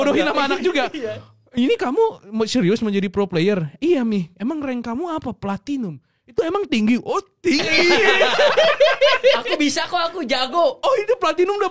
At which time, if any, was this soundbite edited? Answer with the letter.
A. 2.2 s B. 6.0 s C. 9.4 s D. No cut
D